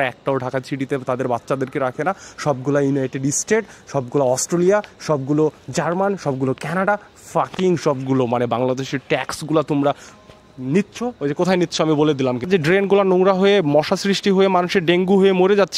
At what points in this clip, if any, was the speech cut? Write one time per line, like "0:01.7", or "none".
0:12.5